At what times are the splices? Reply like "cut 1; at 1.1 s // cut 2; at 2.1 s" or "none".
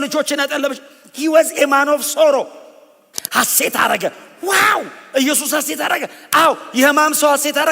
cut 1; at 3.1 s